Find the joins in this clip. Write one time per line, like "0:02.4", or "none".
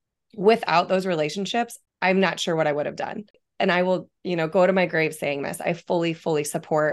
0:01.8
0:03.4